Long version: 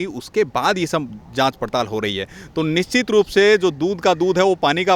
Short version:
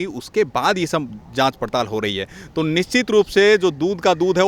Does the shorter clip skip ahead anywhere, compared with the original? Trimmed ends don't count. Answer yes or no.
no